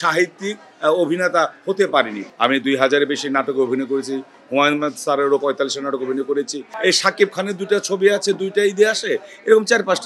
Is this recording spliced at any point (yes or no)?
yes